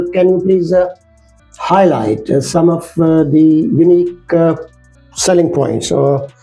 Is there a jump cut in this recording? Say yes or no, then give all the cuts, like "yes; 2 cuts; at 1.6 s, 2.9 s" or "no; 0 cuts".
no; 0 cuts